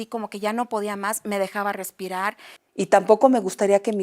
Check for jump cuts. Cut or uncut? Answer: cut